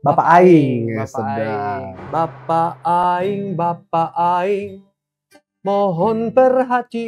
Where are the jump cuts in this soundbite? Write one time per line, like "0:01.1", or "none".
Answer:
0:01.9